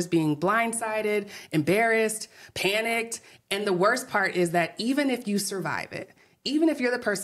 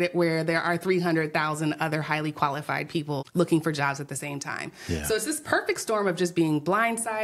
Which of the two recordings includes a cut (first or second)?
second